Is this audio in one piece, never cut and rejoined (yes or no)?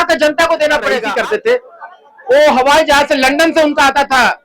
no